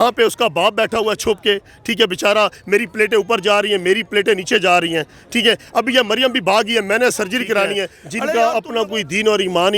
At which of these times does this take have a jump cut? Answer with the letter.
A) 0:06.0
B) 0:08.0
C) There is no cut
B